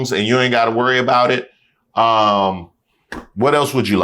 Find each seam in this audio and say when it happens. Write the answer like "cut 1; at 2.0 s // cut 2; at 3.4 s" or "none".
none